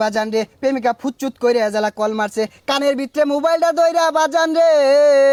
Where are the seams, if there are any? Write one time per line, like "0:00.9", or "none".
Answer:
none